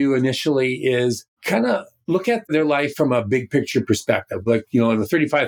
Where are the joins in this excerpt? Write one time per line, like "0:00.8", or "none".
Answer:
0:01.3